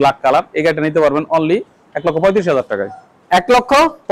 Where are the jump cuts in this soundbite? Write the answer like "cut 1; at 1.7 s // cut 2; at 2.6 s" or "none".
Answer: none